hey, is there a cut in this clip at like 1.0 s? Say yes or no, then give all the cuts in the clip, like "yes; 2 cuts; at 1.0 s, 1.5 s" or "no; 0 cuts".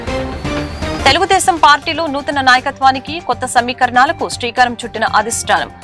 no; 0 cuts